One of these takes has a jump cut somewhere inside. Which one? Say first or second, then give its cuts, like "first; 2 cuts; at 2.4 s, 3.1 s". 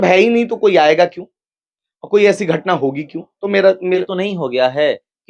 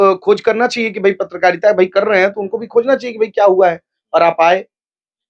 first; 1 cut; at 4.0 s